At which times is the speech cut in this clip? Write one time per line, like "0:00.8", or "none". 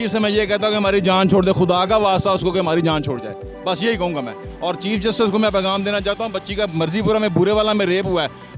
none